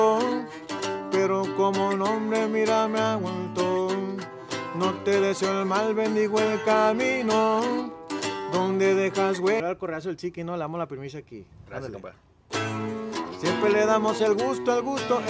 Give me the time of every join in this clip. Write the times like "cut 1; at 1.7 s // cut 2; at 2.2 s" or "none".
cut 1; at 9.6 s